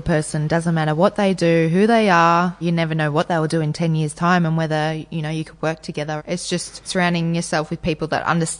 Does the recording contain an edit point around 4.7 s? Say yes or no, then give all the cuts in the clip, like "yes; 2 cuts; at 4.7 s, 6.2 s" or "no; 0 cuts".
no; 2 cuts; at 2.6 s, 6.2 s